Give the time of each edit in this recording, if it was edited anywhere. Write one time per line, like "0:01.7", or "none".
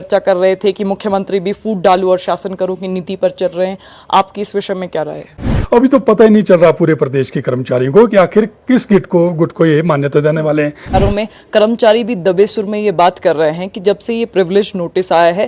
0:05.5
0:10.9